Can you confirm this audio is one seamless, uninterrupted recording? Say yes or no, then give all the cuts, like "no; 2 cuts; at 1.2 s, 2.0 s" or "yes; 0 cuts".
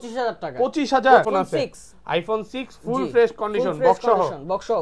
no; 1 cut; at 1.3 s